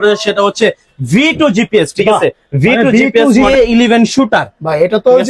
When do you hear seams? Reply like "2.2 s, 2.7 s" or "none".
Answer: 3.5 s